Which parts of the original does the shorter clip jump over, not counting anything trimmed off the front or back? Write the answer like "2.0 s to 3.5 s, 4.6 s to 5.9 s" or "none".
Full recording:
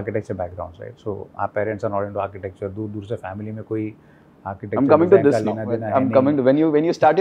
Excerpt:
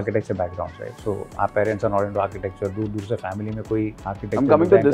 4.0 s to 4.4 s